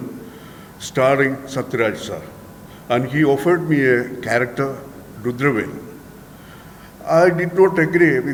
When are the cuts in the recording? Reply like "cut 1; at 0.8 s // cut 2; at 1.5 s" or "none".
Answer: none